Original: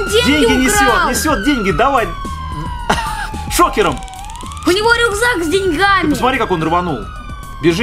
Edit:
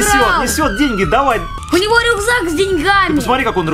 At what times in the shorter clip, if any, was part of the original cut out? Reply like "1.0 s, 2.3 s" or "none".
1.5 s